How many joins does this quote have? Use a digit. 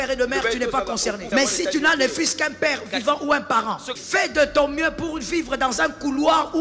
2